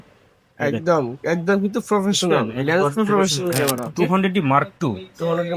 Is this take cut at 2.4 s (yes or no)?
no